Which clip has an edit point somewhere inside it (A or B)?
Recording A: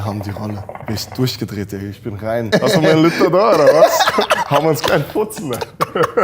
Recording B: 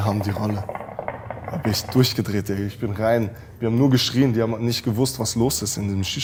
A